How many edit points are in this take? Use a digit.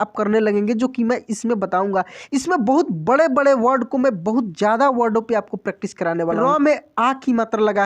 1